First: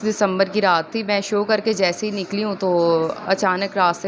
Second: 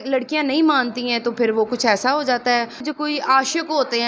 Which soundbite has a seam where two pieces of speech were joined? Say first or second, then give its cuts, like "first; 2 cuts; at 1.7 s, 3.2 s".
second; 1 cut; at 2.8 s